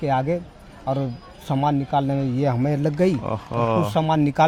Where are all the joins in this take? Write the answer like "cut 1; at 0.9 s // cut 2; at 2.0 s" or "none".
none